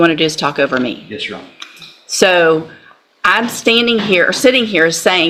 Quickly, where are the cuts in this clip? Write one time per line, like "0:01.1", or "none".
none